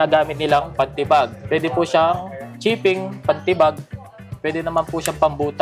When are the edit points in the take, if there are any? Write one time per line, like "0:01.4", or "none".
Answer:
0:01.4